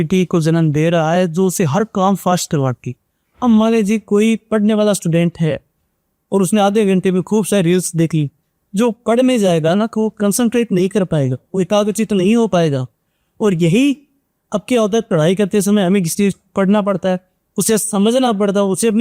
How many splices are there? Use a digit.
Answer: 0